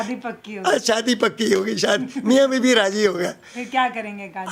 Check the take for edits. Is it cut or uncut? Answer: uncut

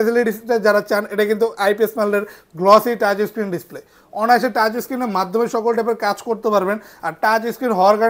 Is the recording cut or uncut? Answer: uncut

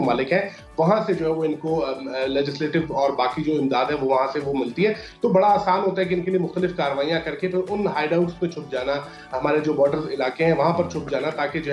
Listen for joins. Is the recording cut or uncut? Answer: uncut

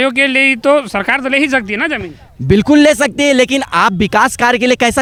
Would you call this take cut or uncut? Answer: uncut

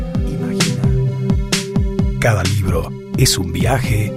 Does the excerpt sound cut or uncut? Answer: uncut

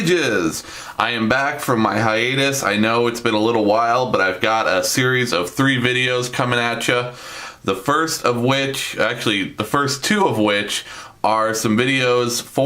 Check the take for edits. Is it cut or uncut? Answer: cut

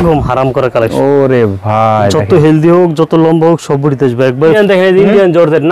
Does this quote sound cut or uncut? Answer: cut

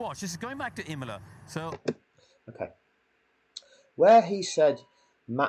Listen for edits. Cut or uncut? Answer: uncut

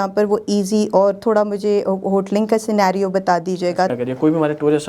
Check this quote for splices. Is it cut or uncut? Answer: cut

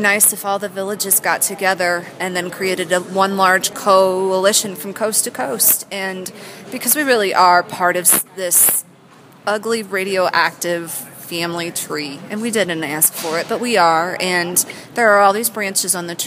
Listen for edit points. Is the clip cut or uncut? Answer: uncut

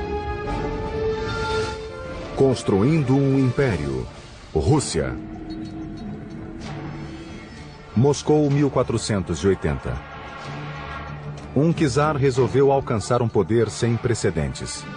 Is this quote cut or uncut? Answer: cut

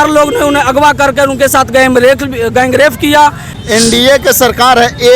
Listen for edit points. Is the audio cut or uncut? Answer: cut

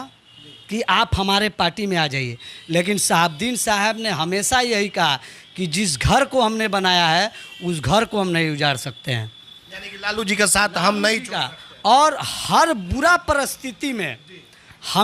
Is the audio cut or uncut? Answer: uncut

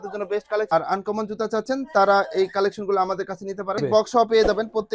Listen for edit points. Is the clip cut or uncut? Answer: cut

